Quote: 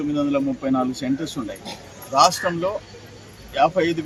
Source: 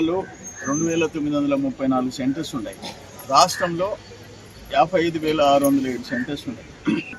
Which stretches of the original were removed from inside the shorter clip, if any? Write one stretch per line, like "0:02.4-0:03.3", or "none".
none